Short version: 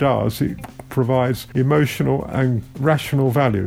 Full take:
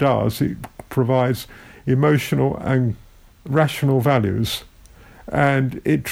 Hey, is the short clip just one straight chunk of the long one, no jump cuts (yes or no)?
no